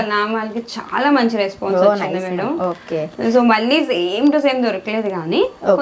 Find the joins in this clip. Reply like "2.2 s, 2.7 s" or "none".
none